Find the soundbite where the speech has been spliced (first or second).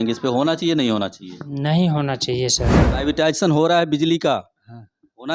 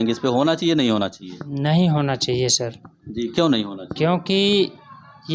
first